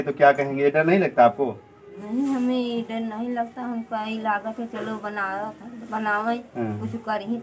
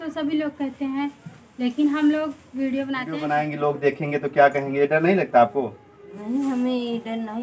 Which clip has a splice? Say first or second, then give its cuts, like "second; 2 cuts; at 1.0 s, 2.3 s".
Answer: second; 1 cut; at 3.1 s